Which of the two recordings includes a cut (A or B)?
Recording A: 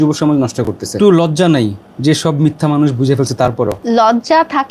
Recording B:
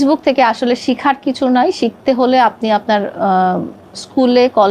A